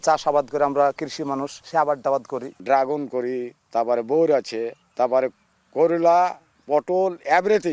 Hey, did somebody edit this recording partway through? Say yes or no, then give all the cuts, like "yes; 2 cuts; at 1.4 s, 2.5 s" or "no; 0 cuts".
yes; 5 cuts; at 1.5 s, 2.5 s, 3.6 s, 4.8 s, 6.5 s